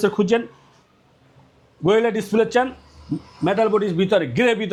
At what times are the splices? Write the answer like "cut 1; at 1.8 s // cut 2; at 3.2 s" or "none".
none